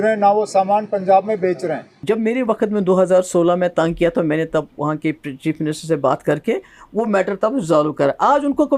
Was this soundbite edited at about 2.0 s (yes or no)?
yes